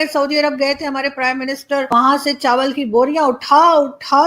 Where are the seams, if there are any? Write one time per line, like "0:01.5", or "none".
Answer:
0:01.9